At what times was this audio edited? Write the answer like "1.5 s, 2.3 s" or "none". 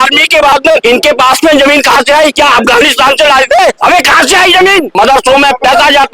0.8 s, 2.3 s, 3.8 s, 4.9 s